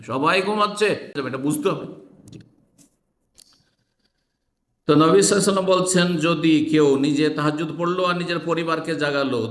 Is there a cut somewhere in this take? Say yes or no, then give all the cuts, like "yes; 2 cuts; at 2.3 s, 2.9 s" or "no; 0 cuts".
yes; 1 cut; at 1.2 s